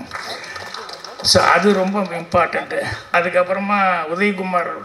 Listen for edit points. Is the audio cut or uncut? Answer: cut